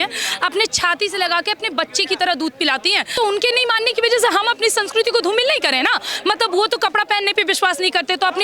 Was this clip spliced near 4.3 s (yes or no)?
no